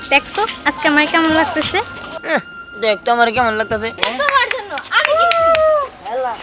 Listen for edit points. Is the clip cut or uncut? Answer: cut